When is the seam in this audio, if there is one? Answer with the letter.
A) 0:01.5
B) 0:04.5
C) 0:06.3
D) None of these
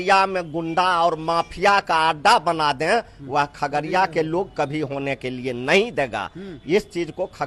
D